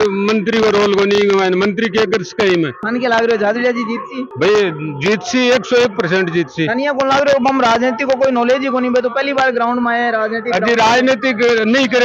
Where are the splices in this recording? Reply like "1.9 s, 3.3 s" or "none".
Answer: none

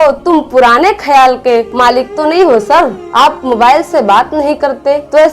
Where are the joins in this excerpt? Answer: 1.7 s

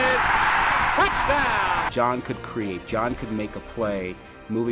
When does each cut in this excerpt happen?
1.9 s

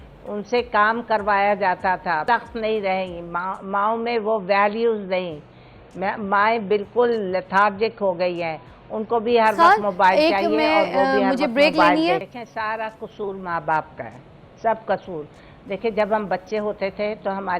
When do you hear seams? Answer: 2.2 s, 12.3 s

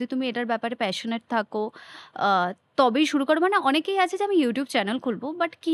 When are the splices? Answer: none

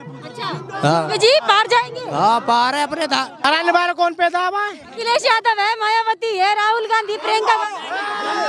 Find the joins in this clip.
3.5 s

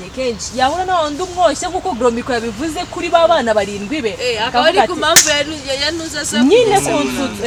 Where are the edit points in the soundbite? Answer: none

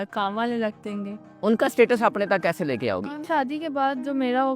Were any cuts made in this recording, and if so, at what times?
1.2 s, 3.2 s

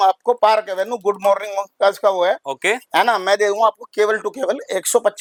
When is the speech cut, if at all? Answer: none

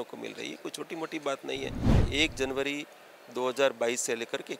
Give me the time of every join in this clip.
2.0 s

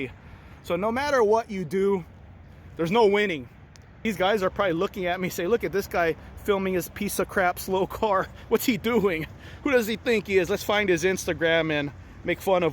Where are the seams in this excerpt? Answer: 4.0 s

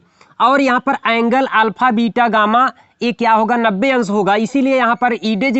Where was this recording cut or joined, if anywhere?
none

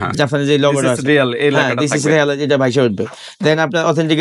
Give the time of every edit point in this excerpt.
none

